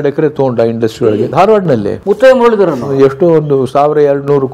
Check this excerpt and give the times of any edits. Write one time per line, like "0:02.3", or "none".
0:00.9
0:02.8